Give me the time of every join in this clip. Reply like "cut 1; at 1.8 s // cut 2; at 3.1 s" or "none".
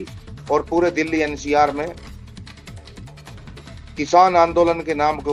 cut 1; at 2.0 s // cut 2; at 3.8 s